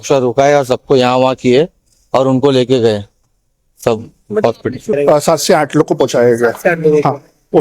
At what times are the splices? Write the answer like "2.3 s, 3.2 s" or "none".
4.9 s